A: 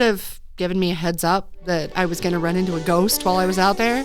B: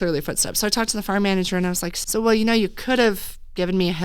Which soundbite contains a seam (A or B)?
B